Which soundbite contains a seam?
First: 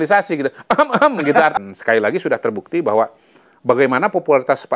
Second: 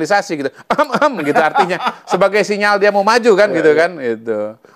first; 1 cut; at 1.6 s

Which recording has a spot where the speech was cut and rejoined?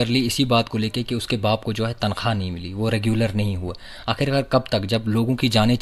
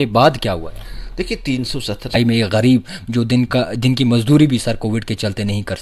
second; 1 cut; at 2.2 s

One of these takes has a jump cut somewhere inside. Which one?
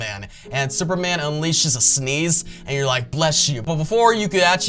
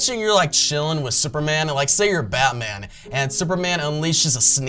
first; 1 cut; at 3.6 s

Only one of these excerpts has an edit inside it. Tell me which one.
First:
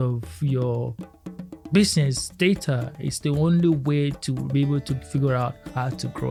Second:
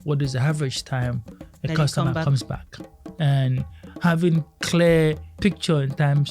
second; 2 cuts; at 3.0 s, 5.3 s

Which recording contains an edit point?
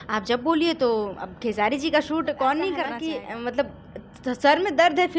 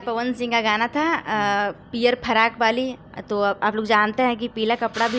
first; 1 cut; at 3.0 s

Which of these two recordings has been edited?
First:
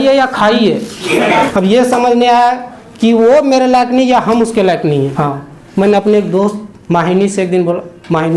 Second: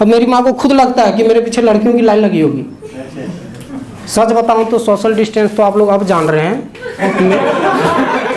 first; 2 cuts; at 1.5 s, 5.1 s

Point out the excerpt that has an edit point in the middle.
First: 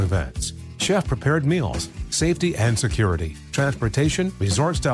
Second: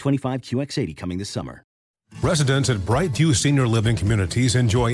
second; 1 cut; at 1.8 s

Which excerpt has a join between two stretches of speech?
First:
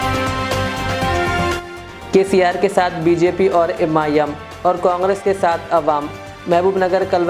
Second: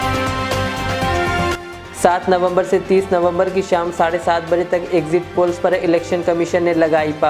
second; 1 cut; at 1.5 s

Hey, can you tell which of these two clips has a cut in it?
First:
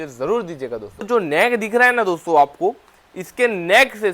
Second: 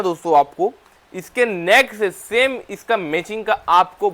first; 1 cut; at 1.1 s

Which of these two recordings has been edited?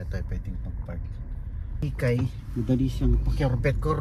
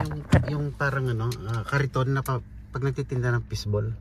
first; 1 cut; at 1.8 s

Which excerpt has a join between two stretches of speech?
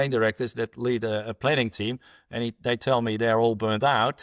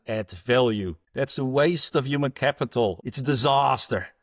second; 2 cuts; at 1.0 s, 3.1 s

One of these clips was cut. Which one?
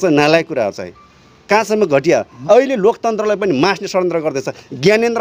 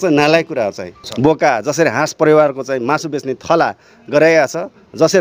second; 1 cut; at 1.0 s

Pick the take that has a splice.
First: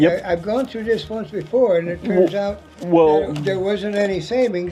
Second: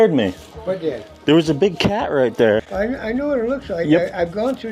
second; 1 cut; at 2.7 s

